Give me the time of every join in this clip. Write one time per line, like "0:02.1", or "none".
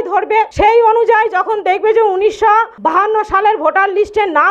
0:02.7